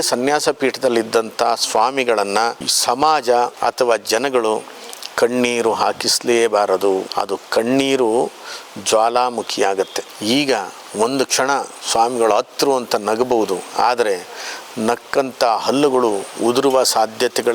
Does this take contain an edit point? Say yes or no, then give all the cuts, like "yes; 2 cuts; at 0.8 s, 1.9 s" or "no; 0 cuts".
yes; 4 cuts; at 2.7 s, 3.5 s, 7.1 s, 10.1 s